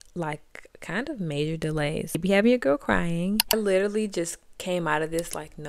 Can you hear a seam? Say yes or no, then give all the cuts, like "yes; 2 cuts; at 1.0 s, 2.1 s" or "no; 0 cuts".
yes; 2 cuts; at 2.2 s, 3.5 s